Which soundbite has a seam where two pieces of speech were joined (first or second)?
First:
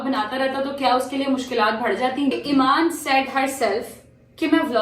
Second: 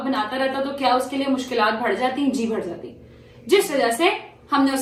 first